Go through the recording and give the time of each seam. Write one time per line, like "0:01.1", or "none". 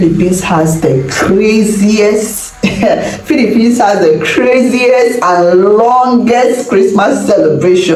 none